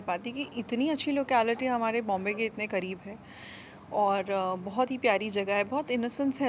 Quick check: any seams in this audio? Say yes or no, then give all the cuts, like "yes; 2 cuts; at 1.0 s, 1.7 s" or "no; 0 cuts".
no; 0 cuts